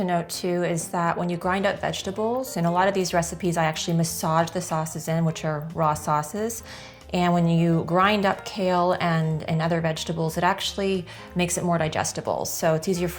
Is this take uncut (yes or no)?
yes